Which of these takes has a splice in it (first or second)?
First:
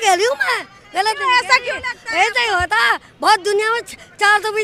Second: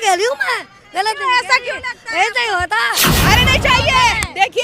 second